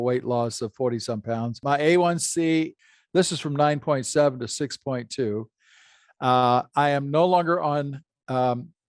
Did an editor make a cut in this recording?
yes; 2 cuts; at 1.5 s, 2.8 s

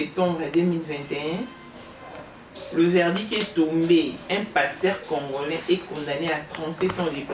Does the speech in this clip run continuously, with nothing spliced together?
yes; 0 cuts

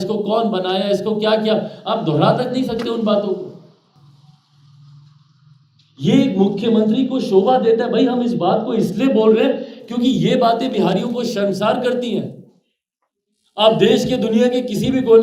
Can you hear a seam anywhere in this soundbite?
no; 0 cuts

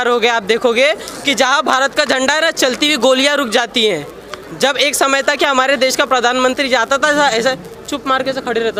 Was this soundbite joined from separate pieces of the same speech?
no; 0 cuts

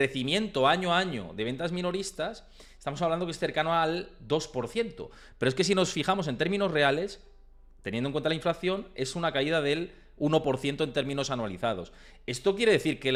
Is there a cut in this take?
no; 0 cuts

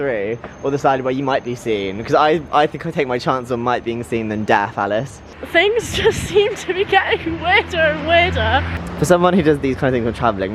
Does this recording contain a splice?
yes; 2 cuts; at 5.4 s, 8.8 s

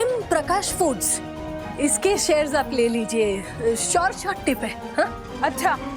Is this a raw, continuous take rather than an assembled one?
yes; 0 cuts

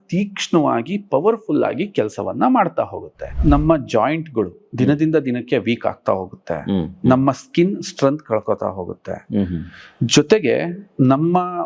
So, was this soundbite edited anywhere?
yes; 1 cut; at 3.3 s

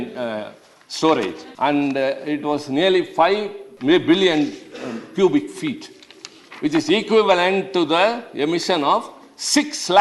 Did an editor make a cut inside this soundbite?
yes; 2 cuts; at 1.4 s, 3.6 s

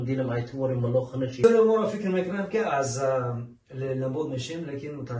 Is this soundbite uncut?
no; 1 cut; at 1.4 s

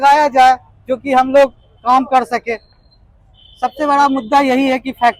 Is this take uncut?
yes; 0 cuts

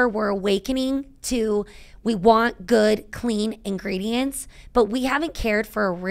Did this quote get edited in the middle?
no; 0 cuts

